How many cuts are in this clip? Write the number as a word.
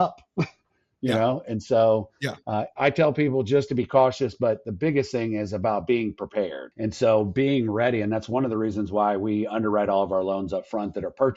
one